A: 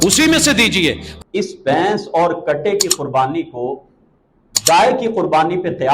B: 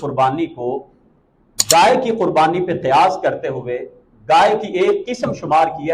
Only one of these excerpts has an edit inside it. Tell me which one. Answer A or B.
A